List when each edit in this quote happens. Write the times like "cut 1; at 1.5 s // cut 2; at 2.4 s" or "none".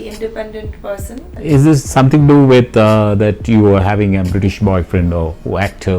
cut 1; at 1.3 s